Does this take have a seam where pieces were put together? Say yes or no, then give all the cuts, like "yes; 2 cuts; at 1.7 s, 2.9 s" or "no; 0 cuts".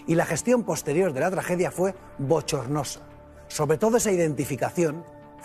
no; 0 cuts